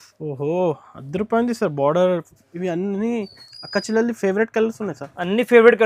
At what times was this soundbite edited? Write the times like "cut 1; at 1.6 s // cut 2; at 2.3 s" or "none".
cut 1; at 2.3 s